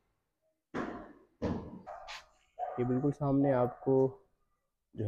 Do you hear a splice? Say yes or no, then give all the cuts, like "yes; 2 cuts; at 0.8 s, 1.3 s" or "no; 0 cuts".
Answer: yes; 1 cut; at 1.9 s